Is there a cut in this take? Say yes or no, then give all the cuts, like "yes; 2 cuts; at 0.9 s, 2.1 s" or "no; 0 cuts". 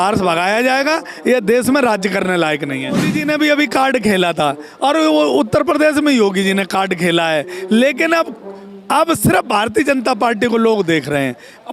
yes; 1 cut; at 3.1 s